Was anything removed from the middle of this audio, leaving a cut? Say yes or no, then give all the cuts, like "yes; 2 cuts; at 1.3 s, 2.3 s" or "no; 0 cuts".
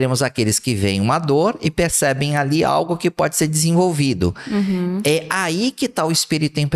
no; 0 cuts